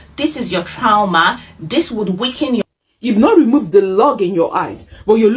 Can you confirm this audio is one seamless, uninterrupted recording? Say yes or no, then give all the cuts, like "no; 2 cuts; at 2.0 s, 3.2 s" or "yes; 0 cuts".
no; 1 cut; at 2.6 s